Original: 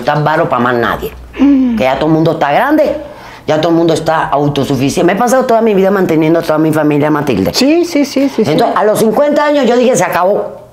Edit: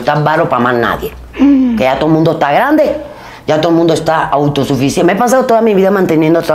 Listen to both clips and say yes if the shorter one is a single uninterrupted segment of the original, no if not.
yes